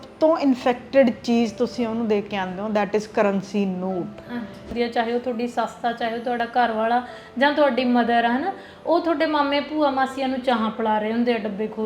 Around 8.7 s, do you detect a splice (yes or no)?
no